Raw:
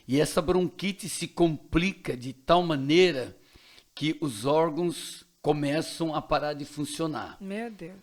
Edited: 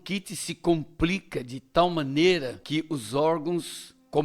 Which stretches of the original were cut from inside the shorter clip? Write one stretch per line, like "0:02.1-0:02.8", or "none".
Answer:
0:03.3-0:03.9